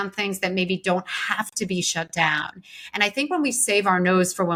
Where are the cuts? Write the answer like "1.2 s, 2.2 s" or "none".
none